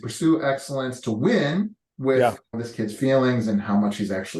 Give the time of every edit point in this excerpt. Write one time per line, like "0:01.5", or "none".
0:01.8
0:02.5